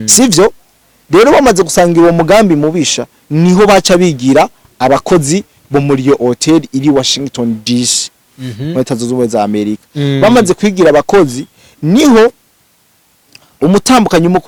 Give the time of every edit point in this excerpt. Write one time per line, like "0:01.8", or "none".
none